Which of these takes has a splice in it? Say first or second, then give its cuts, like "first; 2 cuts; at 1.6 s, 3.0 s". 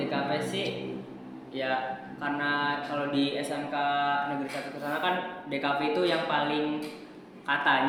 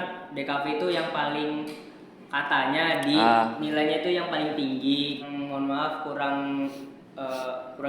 second; 1 cut; at 5.2 s